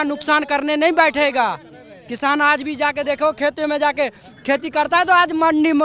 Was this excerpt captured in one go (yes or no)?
yes